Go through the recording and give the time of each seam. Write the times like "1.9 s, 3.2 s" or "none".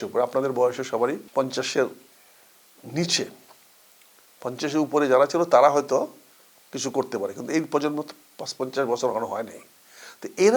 none